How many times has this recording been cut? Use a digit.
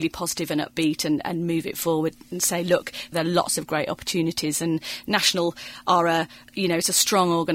2